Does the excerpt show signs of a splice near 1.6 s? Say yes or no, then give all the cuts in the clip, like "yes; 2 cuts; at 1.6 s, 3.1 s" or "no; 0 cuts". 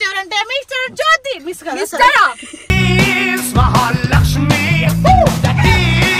no; 0 cuts